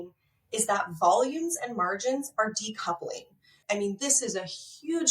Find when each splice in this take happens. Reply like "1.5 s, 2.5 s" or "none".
3.6 s